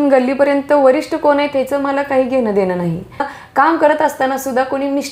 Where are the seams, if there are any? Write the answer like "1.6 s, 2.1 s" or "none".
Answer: 3.4 s

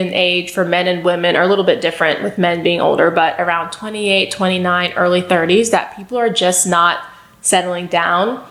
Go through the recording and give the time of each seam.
none

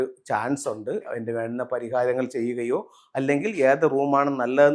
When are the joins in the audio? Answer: 1.0 s

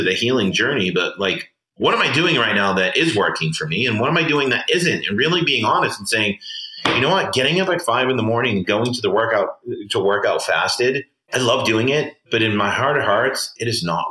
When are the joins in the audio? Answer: none

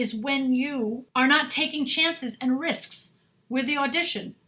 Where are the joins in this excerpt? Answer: 1.0 s

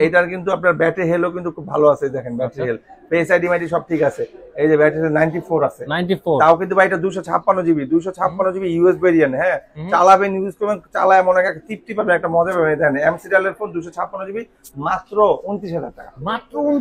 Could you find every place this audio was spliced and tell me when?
none

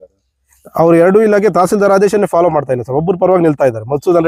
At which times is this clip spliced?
none

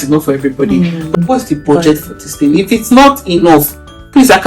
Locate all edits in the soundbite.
1.2 s

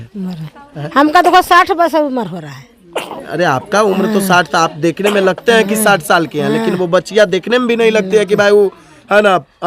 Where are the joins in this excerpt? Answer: none

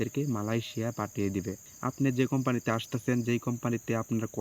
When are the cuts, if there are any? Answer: 1.6 s

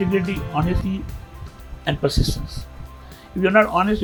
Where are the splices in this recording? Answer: none

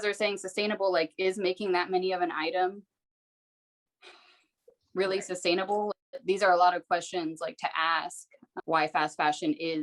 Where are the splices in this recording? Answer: 5.9 s, 8.5 s

